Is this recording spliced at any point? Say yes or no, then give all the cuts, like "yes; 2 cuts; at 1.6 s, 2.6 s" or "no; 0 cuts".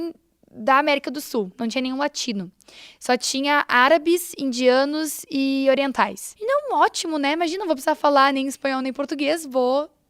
yes; 1 cut; at 6.3 s